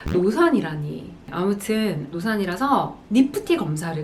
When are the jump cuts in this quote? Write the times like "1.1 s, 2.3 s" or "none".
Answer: none